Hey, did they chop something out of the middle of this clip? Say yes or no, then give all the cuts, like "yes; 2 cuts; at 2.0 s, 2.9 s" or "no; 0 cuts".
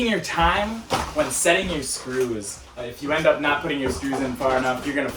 yes; 1 cut; at 2.8 s